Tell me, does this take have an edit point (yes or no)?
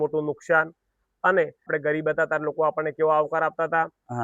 yes